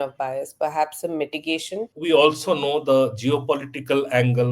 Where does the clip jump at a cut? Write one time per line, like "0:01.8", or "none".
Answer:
0:01.9